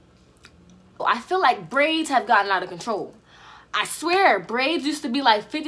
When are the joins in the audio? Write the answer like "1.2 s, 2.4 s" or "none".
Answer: 1.0 s